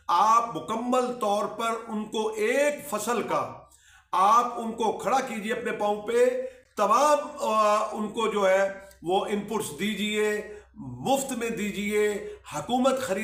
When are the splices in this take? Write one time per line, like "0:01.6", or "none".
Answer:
none